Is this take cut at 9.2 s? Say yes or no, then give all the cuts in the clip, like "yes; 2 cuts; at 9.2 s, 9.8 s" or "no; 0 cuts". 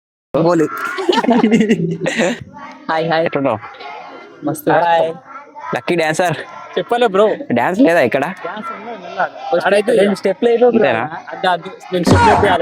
no; 1 cut; at 2.5 s